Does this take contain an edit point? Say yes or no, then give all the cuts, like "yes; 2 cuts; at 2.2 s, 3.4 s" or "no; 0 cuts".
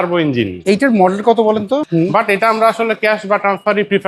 yes; 1 cut; at 1.8 s